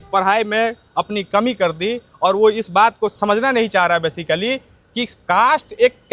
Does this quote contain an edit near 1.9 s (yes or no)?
no